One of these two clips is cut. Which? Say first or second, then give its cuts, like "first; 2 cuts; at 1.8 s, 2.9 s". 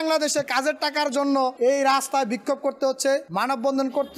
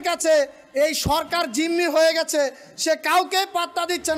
first; 2 cuts; at 1.5 s, 3.3 s